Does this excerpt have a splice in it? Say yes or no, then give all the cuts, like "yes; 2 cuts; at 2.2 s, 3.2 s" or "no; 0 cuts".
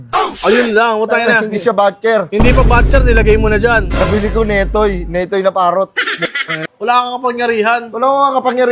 yes; 1 cut; at 6.6 s